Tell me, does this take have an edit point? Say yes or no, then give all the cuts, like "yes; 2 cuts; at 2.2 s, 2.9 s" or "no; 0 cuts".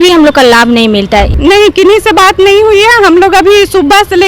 yes; 1 cut; at 1.3 s